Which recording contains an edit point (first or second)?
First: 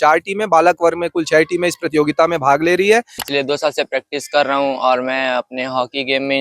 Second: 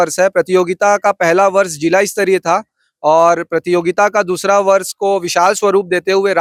first